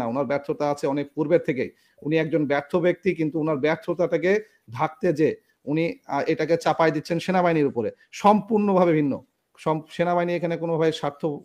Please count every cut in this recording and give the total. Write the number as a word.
zero